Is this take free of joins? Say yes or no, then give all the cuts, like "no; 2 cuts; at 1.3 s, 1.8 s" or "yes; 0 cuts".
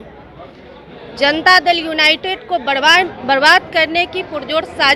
yes; 0 cuts